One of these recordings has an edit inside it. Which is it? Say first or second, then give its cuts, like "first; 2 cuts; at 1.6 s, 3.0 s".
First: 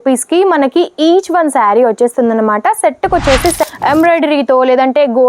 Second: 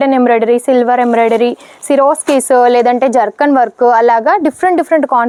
first; 1 cut; at 3.6 s